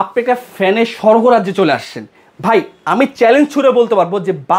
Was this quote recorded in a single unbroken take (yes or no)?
yes